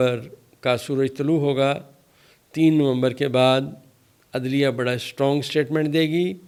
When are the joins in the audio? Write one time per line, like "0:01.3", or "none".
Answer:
none